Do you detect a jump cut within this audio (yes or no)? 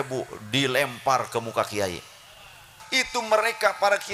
yes